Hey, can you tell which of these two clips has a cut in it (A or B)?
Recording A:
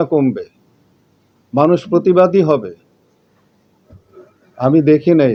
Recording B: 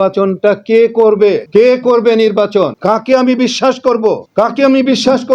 B